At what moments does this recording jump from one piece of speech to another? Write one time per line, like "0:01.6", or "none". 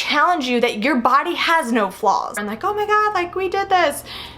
0:02.5